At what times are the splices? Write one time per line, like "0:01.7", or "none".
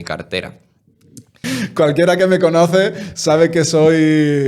0:01.4

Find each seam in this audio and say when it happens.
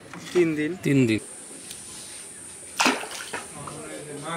0:01.2

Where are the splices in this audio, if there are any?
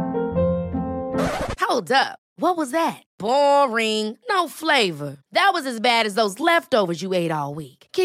none

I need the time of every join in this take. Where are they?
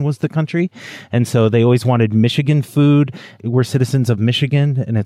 0:03.4

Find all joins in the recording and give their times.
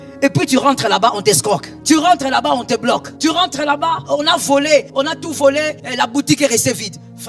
0:01.7
0:03.1
0:04.0
0:04.9
0:05.8

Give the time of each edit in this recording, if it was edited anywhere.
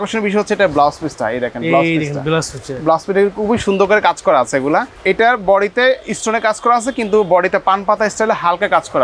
0:04.9

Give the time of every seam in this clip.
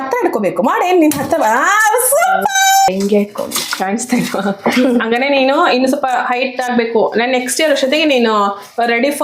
0:02.9

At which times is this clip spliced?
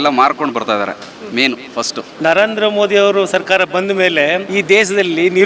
0:02.0
0:04.5

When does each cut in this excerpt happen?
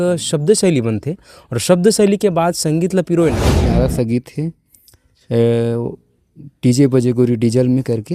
0:03.6

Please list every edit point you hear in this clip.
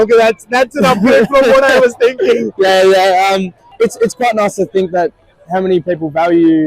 0:03.6

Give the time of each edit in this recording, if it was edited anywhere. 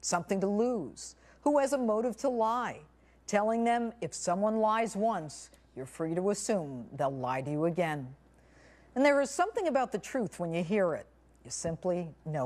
none

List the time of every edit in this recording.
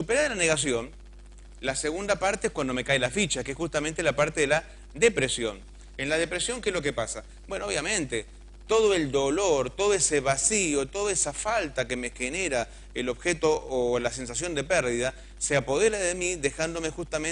0:10.4

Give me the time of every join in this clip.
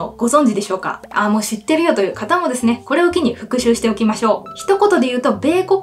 none

